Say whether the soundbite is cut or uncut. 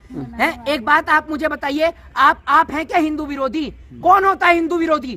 uncut